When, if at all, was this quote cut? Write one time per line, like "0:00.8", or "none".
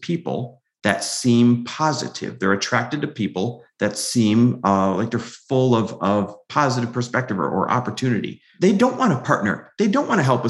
none